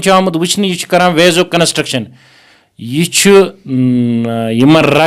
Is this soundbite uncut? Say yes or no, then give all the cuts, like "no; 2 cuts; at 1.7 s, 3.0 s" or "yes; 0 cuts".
yes; 0 cuts